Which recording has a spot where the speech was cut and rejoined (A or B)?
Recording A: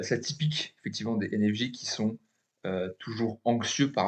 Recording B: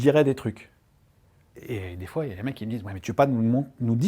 B